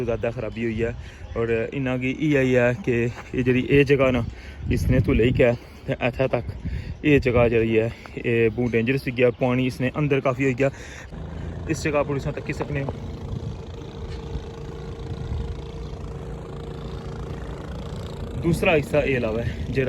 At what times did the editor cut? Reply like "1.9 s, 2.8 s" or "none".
11.0 s